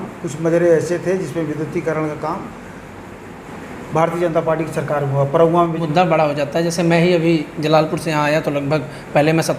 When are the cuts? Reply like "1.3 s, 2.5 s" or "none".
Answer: 5.8 s